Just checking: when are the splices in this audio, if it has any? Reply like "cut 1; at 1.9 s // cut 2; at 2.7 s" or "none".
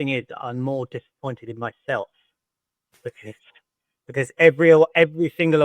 none